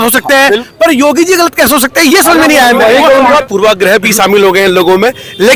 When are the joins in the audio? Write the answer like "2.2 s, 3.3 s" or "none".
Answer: 3.4 s